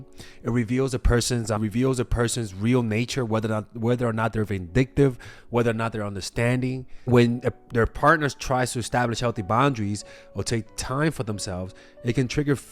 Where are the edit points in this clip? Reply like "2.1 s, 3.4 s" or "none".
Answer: 1.6 s, 6.9 s